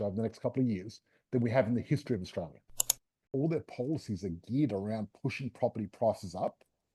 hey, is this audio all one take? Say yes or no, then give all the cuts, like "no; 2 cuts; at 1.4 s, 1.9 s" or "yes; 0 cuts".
no; 1 cut; at 3.1 s